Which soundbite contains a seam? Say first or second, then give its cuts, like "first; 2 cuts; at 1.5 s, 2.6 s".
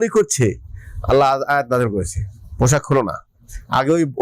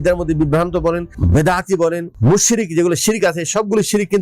second; 2 cuts; at 1.1 s, 2.1 s